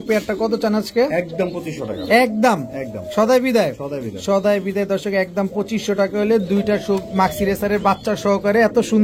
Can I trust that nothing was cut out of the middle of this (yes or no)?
yes